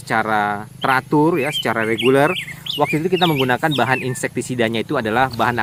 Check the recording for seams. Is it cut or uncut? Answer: uncut